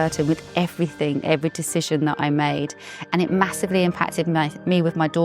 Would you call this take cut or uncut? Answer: uncut